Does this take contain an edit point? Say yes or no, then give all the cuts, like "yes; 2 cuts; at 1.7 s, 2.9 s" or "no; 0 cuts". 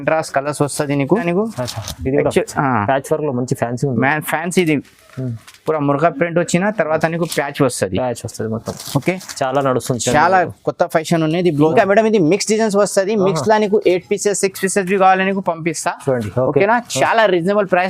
yes; 2 cuts; at 1.2 s, 11.7 s